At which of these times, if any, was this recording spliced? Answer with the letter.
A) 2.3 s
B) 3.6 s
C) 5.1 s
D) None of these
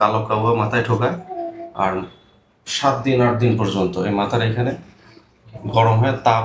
D